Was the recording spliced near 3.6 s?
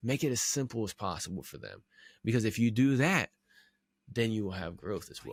no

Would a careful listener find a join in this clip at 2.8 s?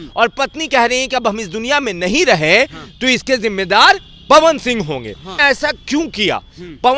no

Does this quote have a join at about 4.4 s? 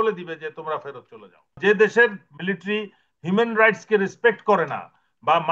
no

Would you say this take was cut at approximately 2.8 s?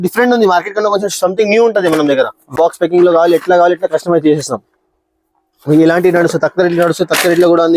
yes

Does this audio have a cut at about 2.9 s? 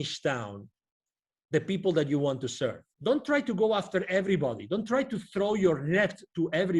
yes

